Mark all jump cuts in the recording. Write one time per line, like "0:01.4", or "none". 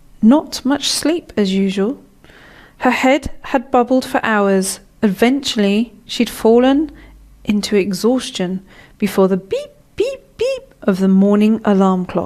0:05.7

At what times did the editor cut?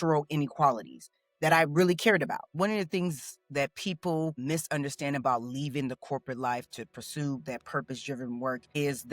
0:02.4

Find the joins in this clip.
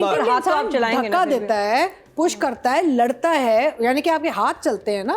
none

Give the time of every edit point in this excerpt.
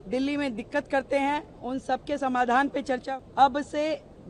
0:03.0

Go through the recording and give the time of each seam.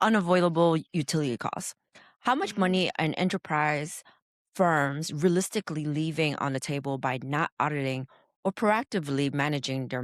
none

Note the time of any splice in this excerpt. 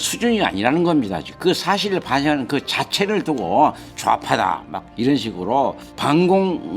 0:01.3
0:05.9

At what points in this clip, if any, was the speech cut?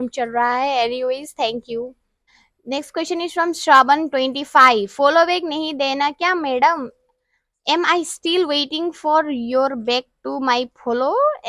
none

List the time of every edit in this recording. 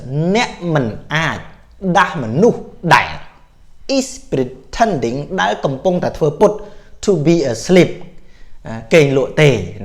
none

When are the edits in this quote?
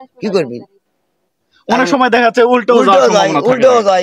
none

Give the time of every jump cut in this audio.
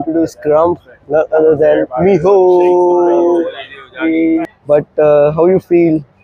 0:04.4

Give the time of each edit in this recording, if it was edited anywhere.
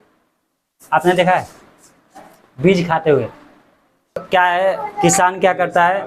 0:04.2

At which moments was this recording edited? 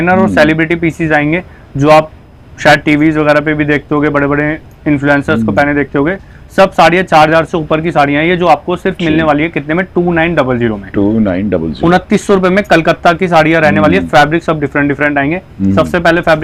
none

